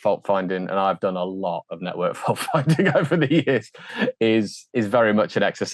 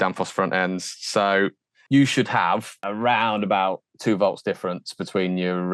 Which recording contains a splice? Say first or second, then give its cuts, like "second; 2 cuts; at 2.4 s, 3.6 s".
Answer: second; 2 cuts; at 1.7 s, 2.8 s